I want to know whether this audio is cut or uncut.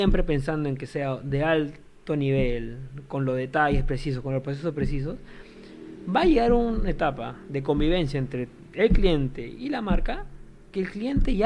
uncut